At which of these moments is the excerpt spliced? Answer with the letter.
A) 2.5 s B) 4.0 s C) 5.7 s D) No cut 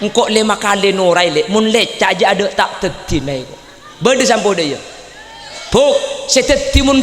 D